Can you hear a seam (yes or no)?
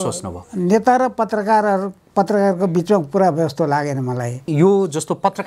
yes